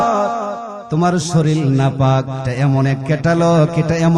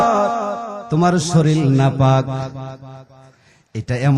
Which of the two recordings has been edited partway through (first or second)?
first